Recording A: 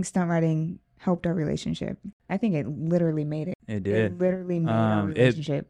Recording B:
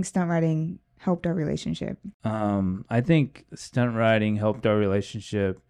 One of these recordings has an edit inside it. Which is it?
A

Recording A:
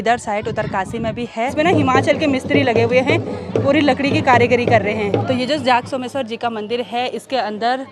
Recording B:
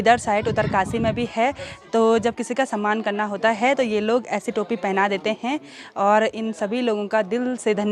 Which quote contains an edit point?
A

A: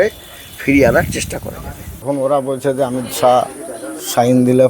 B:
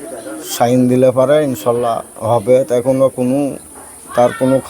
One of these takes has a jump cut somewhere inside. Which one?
A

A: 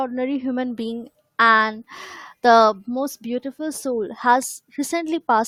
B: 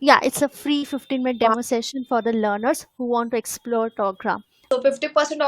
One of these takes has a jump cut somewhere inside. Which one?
B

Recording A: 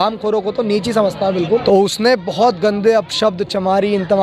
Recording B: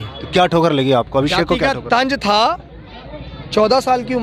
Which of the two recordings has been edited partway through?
A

